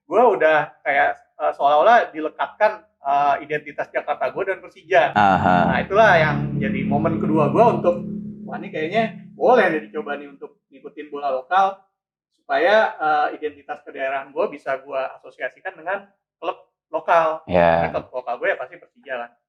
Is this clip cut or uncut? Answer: uncut